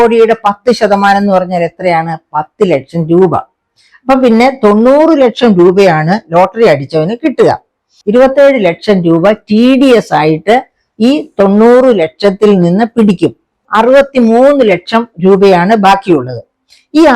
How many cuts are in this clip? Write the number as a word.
two